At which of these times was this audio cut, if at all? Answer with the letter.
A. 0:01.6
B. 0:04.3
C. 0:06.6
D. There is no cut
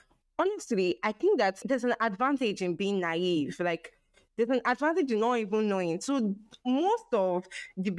A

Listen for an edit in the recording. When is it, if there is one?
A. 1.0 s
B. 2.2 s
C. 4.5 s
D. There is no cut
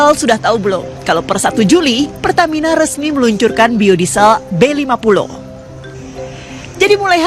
D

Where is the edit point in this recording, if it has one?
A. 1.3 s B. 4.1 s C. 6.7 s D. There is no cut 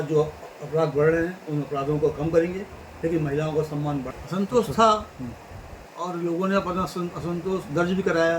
B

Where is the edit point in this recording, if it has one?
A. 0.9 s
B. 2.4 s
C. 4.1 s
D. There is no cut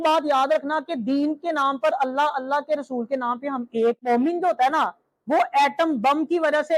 C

